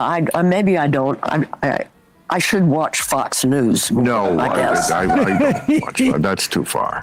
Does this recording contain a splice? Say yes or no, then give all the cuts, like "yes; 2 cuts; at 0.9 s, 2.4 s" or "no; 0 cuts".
no; 0 cuts